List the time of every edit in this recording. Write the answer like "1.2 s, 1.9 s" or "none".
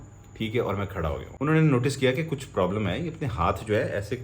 1.2 s